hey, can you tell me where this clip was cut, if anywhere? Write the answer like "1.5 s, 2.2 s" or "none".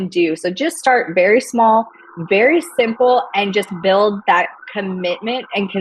none